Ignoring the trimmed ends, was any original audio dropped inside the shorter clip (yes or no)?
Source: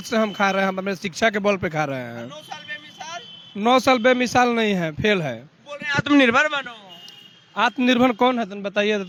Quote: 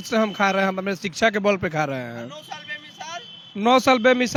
no